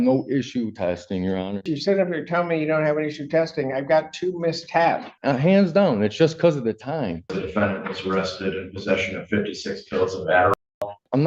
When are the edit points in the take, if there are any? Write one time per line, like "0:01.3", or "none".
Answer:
0:01.7
0:05.1
0:07.4
0:10.6

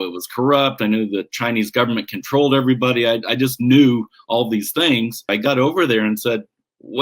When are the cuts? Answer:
0:05.3

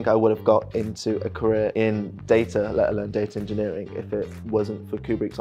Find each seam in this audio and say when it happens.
0:01.7

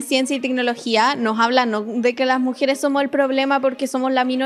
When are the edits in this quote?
none

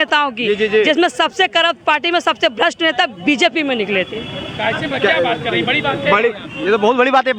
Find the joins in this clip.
none

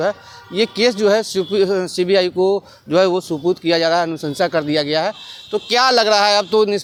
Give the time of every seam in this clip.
none

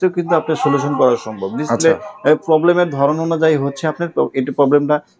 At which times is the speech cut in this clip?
none

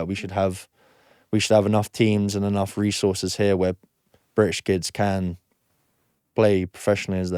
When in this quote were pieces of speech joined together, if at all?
none

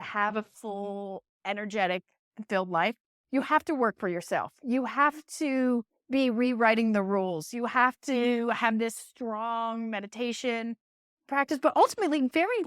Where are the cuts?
0:11.3

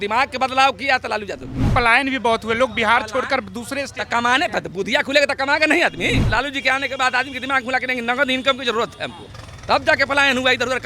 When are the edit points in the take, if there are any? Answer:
0:01.7
0:06.3

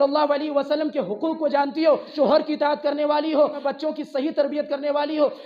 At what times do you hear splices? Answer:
0:02.1
0:03.6

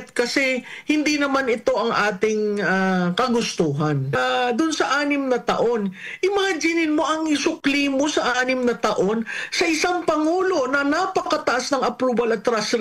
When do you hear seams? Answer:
0:04.2

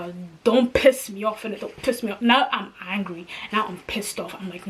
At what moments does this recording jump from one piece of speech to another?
none

